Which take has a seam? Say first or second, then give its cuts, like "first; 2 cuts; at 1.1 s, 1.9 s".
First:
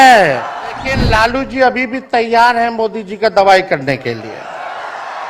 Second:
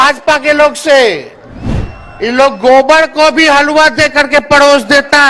first; 1 cut; at 1.0 s